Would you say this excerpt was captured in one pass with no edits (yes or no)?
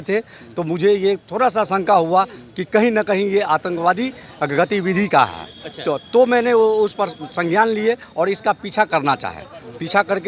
yes